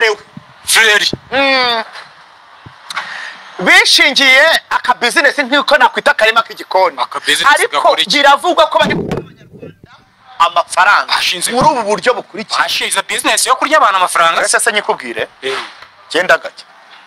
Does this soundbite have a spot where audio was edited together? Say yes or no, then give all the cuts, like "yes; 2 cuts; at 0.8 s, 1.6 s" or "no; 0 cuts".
no; 0 cuts